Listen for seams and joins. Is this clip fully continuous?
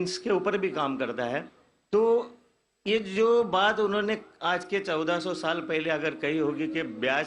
yes; 0 cuts

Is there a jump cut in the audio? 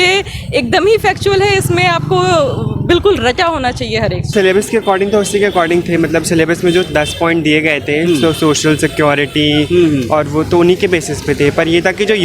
no; 0 cuts

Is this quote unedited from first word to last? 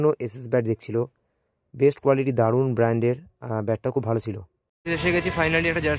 yes; 0 cuts

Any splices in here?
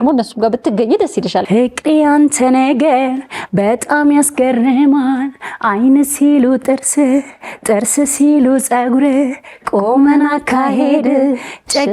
yes; 1 cut; at 1.4 s

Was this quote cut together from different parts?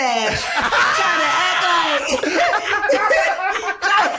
no; 0 cuts

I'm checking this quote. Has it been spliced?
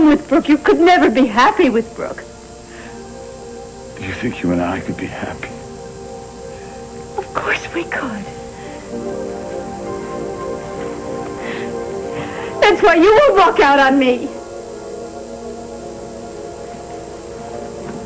no; 0 cuts

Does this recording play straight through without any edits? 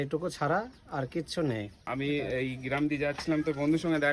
no; 1 cut; at 1.8 s

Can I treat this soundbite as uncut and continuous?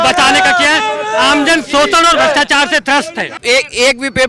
no; 1 cut; at 3.4 s

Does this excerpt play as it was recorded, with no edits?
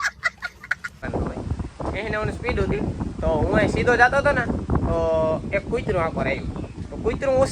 no; 1 cut; at 1.0 s

